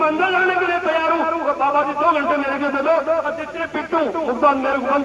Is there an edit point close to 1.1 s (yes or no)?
no